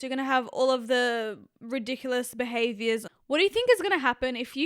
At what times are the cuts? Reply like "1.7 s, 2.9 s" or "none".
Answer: 3.1 s